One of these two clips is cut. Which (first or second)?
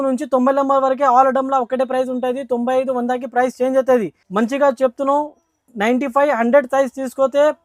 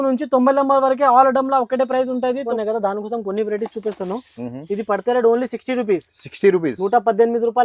second